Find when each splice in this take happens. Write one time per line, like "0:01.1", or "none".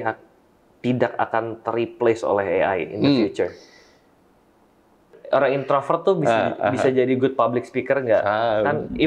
0:04.9